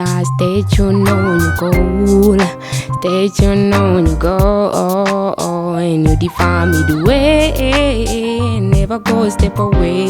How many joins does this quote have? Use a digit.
0